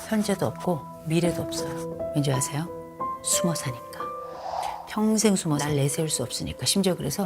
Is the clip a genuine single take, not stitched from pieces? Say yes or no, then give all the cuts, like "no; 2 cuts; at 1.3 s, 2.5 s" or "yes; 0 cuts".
no; 3 cuts; at 1.9 s, 4.2 s, 5.6 s